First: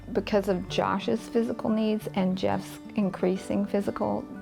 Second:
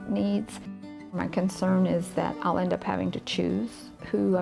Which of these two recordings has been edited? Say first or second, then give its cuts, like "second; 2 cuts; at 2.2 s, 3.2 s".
second; 1 cut; at 1.2 s